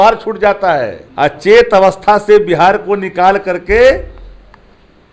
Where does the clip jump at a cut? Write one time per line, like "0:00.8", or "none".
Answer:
0:01.0

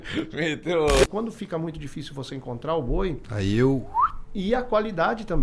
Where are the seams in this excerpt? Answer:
0:01.0

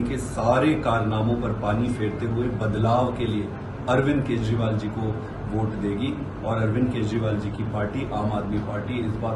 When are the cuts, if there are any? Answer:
none

